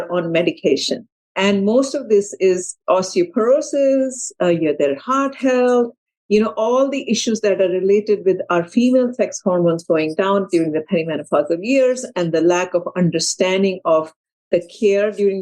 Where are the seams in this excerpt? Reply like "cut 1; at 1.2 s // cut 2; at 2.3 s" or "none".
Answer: cut 1; at 2.7 s